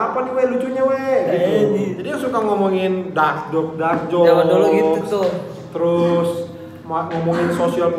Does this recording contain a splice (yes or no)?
yes